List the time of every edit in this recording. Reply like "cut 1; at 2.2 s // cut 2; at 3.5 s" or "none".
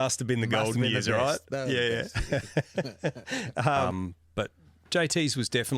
cut 1; at 3.9 s